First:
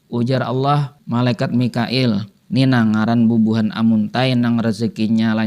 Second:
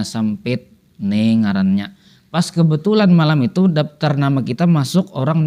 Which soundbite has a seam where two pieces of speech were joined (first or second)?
first